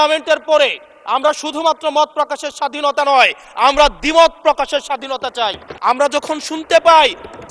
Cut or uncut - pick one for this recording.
cut